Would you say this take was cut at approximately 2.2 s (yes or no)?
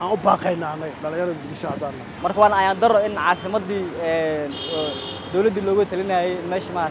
yes